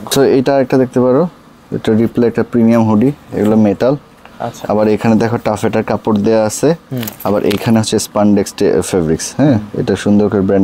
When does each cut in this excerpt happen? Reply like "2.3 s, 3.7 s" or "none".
none